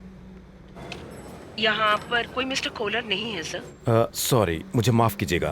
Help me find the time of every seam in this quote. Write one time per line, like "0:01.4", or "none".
none